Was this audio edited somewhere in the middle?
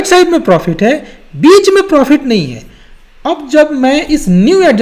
no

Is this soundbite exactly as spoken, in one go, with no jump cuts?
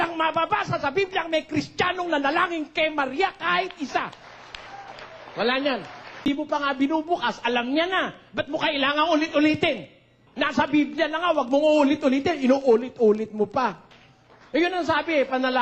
no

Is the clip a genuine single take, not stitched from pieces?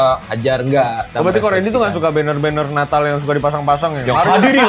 no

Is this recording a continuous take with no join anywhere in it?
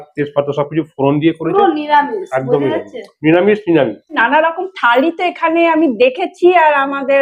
no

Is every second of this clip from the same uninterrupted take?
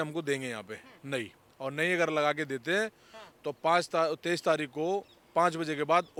yes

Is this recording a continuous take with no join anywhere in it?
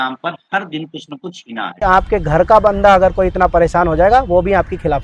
no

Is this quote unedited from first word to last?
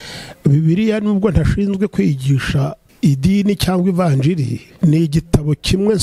no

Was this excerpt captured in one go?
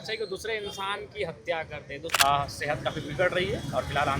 no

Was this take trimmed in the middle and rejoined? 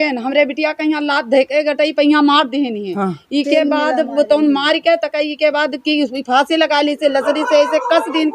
no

